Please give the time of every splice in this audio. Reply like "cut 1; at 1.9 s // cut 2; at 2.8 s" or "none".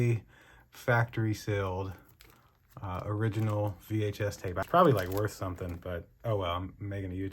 cut 1; at 4.6 s